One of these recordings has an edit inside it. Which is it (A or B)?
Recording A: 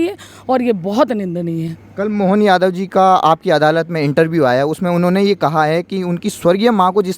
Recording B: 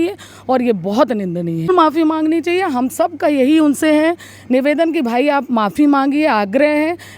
B